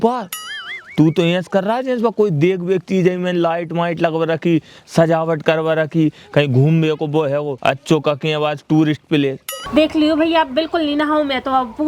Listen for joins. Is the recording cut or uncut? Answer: cut